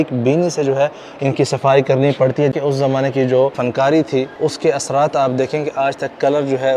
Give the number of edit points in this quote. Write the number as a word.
two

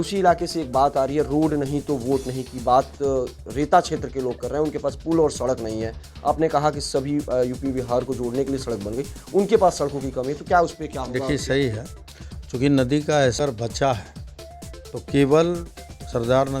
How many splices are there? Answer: one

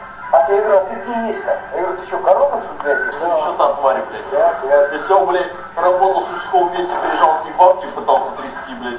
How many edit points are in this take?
one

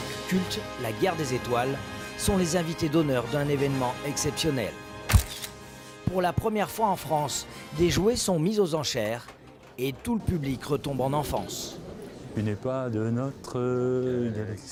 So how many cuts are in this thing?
zero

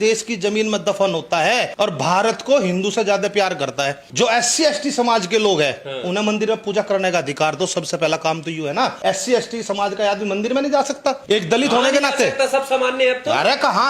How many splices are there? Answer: four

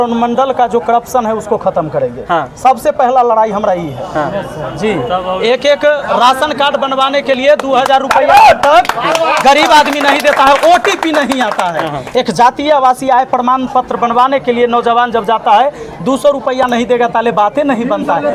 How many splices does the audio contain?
zero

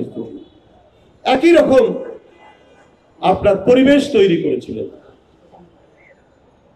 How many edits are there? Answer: zero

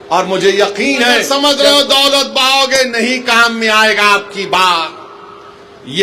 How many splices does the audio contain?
one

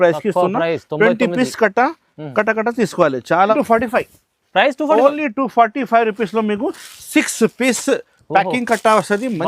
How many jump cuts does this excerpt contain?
one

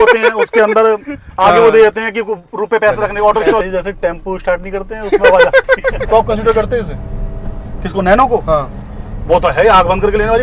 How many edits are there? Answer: two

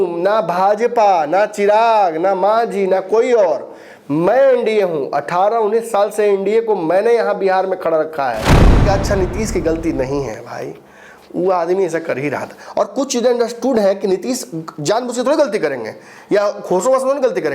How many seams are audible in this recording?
one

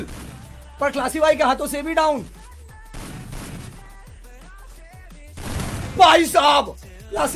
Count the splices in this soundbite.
zero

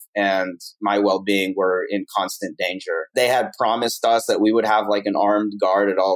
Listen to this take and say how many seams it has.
one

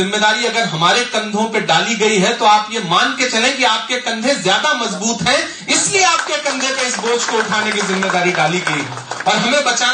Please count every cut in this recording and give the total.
zero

